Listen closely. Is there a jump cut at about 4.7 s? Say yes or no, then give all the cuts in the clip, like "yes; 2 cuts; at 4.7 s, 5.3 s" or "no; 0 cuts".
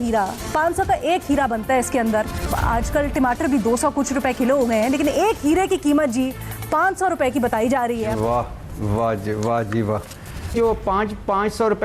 no; 3 cuts; at 2.5 s, 8.1 s, 10.5 s